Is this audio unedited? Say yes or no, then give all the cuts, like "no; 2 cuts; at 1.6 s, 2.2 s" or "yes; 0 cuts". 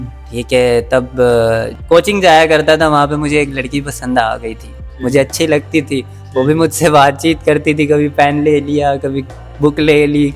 no; 1 cut; at 1.7 s